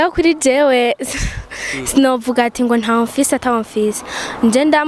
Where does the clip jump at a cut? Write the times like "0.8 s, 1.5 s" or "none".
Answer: none